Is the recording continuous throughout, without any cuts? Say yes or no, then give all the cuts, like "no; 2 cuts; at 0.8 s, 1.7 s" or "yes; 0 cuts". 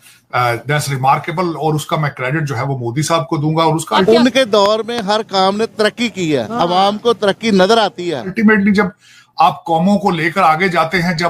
no; 2 cuts; at 4.0 s, 8.3 s